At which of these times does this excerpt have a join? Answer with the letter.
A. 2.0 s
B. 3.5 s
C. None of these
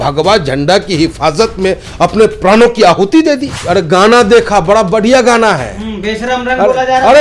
B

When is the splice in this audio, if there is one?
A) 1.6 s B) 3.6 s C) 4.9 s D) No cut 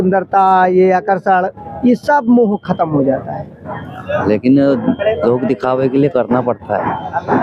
D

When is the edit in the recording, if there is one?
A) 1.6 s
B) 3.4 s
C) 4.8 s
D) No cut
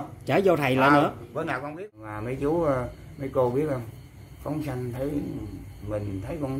A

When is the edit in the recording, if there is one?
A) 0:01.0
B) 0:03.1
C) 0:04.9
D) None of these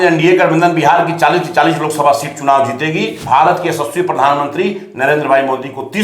B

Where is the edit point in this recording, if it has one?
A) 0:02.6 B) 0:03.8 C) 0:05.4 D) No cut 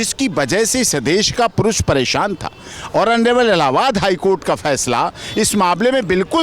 D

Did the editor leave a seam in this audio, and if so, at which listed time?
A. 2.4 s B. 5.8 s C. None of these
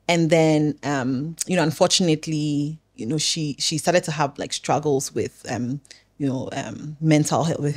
C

